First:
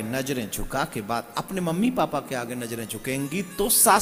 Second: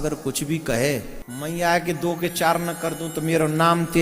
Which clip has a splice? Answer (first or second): second